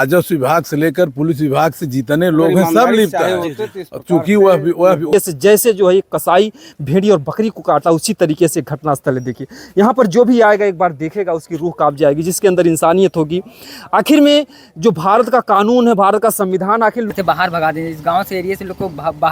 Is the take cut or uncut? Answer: cut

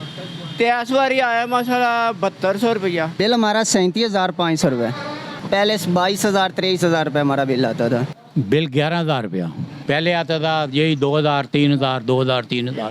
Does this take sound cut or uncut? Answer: cut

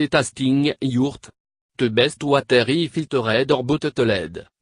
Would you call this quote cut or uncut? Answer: cut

